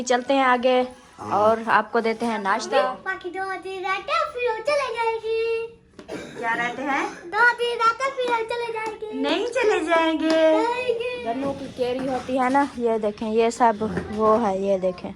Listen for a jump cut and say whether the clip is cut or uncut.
cut